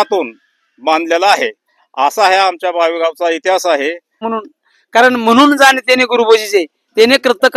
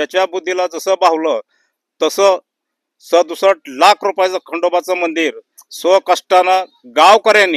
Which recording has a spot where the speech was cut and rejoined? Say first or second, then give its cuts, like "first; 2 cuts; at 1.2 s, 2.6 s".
first; 1 cut; at 4.3 s